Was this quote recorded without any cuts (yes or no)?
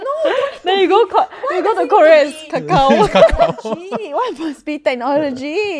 yes